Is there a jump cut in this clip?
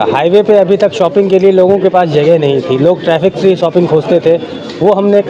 no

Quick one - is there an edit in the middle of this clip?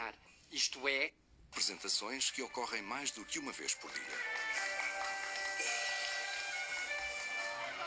yes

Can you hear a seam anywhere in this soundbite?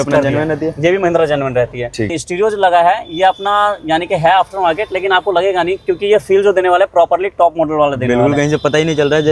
yes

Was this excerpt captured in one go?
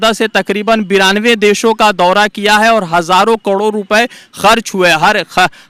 yes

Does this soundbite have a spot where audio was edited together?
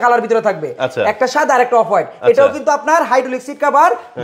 no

